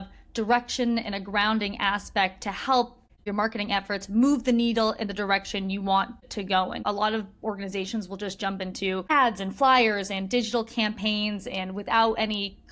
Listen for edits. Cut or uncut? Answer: cut